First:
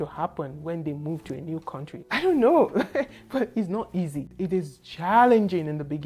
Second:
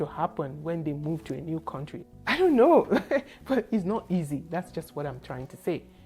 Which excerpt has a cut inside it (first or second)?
first